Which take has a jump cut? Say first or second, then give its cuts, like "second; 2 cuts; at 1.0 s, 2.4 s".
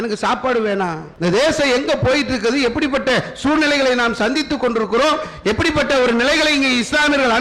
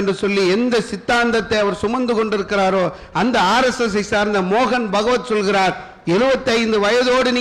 first; 1 cut; at 1.1 s